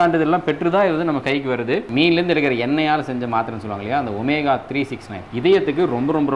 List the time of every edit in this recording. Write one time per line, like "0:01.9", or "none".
0:01.9
0:05.2